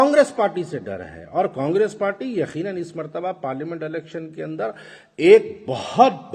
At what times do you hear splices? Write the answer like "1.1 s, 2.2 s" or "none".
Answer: none